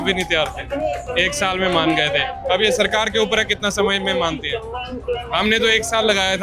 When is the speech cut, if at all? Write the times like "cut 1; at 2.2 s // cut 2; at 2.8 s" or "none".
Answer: none